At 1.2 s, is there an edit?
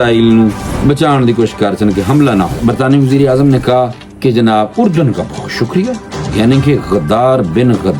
no; 1 cut; at 2.6 s

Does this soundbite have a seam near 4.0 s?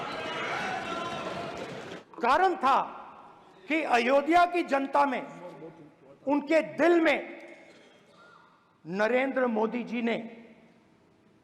no; 1 cut; at 2.0 s

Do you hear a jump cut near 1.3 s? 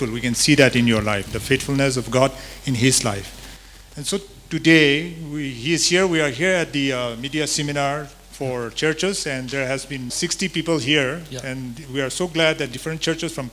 yes; 1 cut; at 1.3 s

